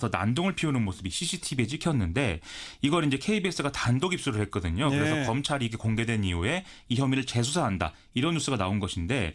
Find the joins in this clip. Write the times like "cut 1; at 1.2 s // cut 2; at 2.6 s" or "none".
none